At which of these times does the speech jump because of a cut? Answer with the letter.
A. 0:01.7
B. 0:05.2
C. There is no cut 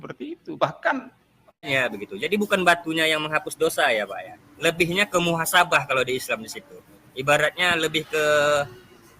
A